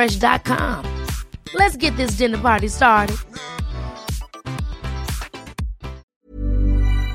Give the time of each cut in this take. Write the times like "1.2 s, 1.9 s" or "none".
6.1 s